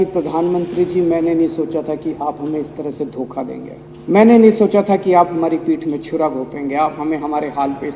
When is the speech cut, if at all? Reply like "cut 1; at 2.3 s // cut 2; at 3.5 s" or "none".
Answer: cut 1; at 3.8 s